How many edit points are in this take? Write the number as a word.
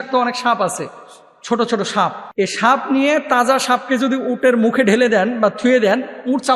one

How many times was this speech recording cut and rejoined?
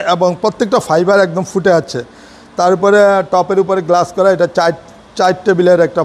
zero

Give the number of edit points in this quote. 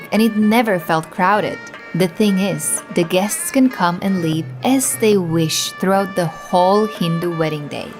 zero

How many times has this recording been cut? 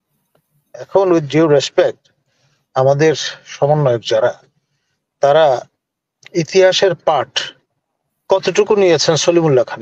zero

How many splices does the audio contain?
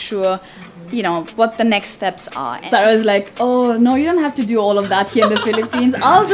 one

